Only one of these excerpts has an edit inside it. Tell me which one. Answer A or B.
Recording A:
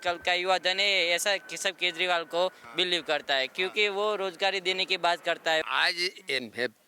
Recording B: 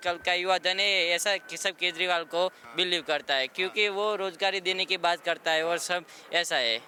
A